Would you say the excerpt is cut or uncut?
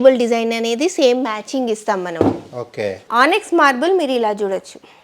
cut